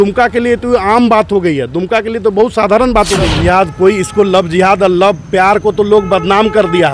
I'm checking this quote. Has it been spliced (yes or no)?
yes